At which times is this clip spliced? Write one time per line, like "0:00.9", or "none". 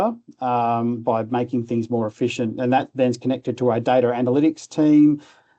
none